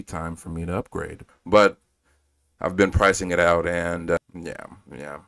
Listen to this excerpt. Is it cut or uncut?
cut